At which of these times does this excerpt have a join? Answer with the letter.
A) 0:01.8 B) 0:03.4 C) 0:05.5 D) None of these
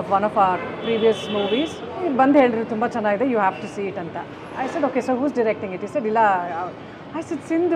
A